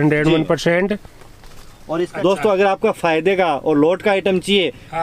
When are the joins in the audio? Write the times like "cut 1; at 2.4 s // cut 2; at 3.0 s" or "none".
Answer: cut 1; at 2.1 s